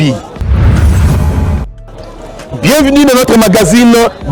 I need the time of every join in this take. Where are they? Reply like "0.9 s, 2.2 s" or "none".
none